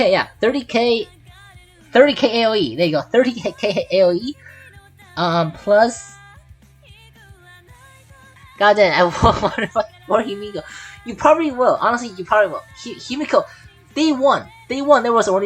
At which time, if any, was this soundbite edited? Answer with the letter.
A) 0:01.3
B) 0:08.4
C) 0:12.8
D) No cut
B